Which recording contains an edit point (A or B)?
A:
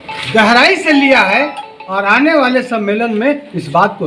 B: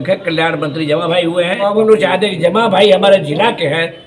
B